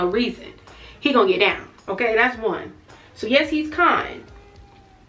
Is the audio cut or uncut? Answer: uncut